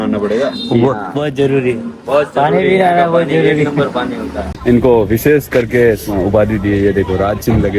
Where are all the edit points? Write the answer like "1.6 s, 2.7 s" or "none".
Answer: 4.5 s